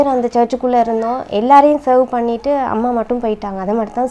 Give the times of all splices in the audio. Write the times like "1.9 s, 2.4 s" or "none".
none